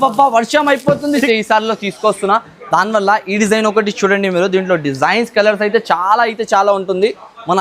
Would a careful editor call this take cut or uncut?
cut